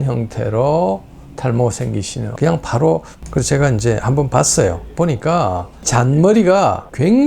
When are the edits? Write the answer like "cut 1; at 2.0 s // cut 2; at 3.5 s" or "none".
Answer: cut 1; at 3.1 s